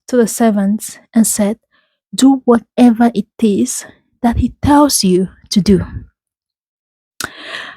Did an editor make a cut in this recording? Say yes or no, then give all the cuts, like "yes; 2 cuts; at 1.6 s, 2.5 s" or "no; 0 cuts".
no; 0 cuts